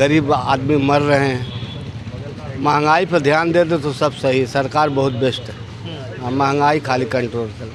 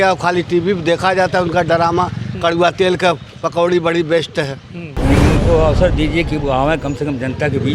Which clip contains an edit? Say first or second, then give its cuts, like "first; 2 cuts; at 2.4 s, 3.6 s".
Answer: second; 1 cut; at 5.0 s